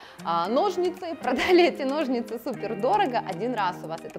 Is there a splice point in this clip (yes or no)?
yes